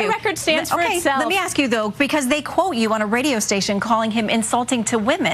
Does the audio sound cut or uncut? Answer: uncut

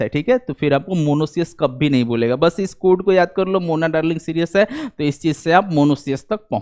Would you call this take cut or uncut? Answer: uncut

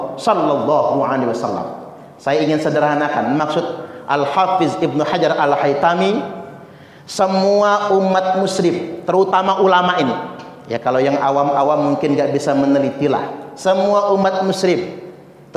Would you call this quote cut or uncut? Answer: uncut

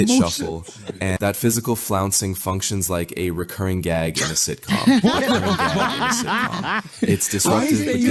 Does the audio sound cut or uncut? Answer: cut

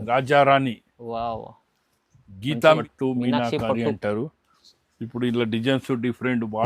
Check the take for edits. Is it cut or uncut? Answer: cut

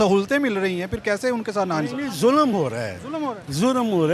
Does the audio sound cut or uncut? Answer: uncut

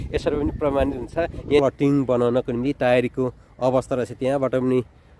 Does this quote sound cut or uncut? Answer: cut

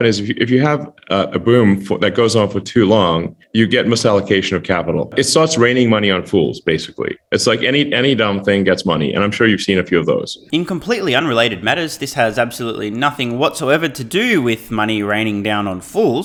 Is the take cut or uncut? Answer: uncut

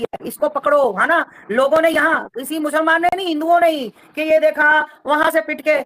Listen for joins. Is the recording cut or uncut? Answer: uncut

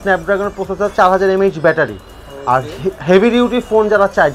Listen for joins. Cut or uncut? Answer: uncut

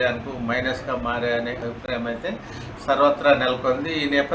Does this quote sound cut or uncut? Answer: cut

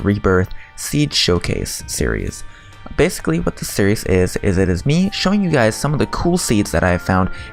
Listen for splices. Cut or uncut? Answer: uncut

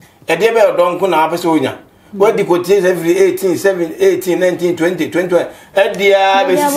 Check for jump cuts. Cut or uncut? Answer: uncut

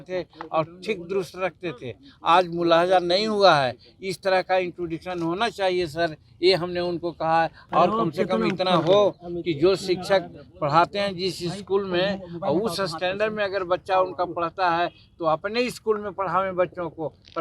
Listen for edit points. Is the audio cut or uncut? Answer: cut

